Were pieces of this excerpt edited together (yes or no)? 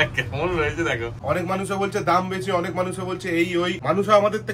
yes